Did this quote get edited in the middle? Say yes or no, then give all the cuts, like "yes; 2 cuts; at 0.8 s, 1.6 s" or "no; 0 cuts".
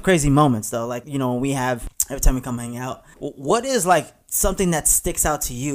yes; 3 cuts; at 1.0 s, 1.9 s, 3.1 s